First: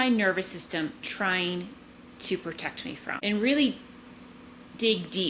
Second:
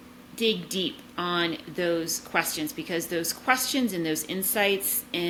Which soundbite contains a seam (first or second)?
first